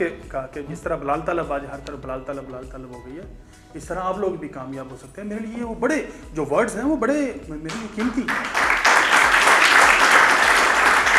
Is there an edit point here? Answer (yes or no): no